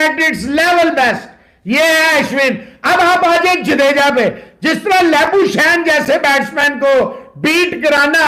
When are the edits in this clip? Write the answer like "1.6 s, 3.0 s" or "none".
none